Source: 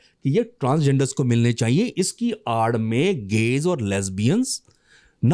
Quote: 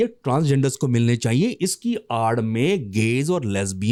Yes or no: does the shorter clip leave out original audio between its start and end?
no